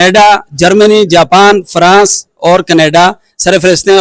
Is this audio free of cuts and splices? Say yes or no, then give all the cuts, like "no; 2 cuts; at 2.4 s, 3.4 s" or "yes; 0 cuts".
yes; 0 cuts